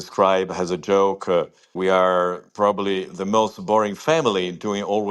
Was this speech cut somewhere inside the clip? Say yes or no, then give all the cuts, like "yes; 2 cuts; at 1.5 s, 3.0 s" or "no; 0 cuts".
no; 0 cuts